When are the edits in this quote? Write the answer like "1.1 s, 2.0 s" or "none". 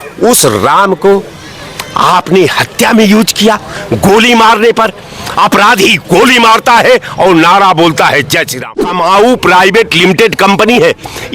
8.8 s